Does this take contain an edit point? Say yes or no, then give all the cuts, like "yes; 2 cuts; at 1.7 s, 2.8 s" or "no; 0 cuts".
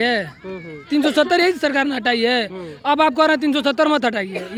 no; 0 cuts